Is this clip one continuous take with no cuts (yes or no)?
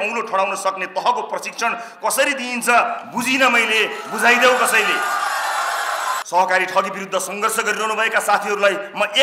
no